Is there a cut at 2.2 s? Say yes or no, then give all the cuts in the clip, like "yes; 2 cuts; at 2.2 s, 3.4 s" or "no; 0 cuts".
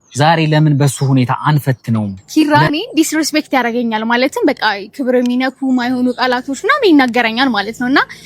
yes; 1 cut; at 2.2 s